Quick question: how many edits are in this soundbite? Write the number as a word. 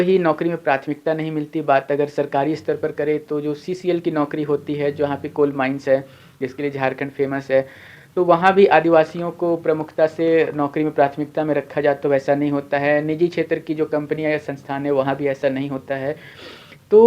zero